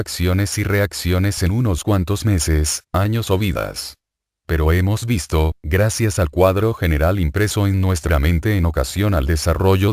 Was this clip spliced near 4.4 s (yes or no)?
yes